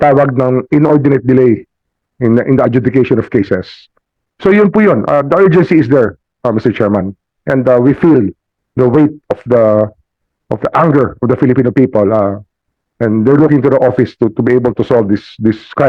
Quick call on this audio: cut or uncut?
uncut